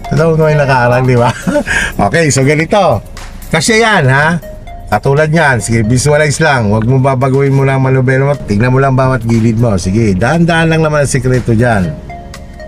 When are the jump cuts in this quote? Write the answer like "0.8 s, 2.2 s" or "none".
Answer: none